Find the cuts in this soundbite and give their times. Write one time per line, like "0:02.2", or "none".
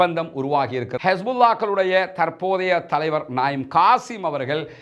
0:00.9